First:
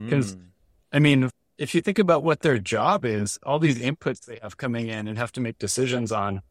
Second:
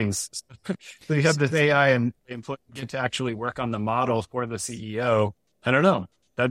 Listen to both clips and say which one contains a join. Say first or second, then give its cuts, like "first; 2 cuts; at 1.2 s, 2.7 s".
second; 1 cut; at 5.5 s